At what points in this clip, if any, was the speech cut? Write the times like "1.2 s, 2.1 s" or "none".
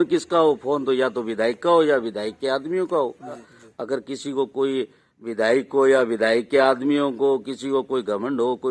3.5 s